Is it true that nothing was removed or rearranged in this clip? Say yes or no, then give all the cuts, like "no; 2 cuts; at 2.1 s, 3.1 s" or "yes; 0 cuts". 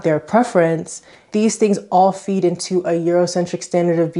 no; 1 cut; at 1.3 s